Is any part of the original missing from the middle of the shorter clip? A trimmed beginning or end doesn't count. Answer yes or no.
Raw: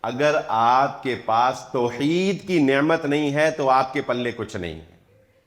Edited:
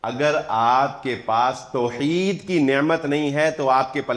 no